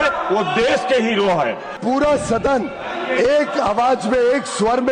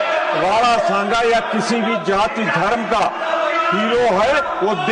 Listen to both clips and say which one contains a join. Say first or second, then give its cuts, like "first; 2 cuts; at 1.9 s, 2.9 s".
first; 1 cut; at 1.8 s